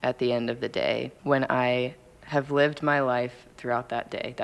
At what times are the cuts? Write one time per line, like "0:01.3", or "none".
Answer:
0:01.1